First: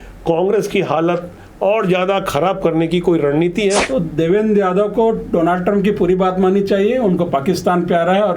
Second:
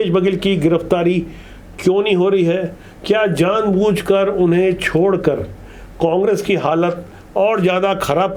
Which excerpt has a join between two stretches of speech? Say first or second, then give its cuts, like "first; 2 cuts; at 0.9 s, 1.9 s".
first; 1 cut; at 3.8 s